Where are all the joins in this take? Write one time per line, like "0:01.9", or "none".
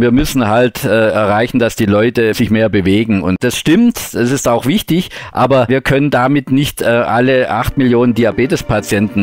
0:02.4
0:03.4
0:05.7